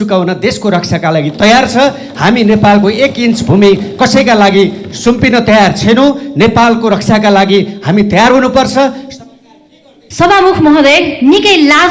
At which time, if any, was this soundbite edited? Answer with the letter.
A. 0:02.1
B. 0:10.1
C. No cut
B